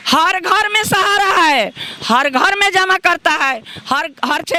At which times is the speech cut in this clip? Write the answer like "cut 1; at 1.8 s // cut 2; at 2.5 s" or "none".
none